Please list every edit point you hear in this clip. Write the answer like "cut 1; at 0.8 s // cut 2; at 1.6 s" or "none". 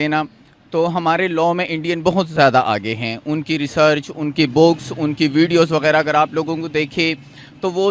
none